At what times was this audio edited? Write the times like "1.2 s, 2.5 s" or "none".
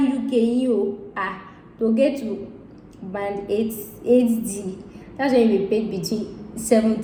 none